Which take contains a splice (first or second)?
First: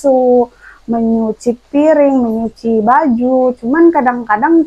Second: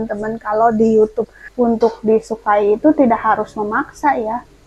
second